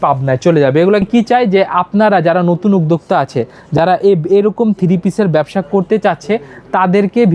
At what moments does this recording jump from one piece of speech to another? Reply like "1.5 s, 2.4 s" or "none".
1.0 s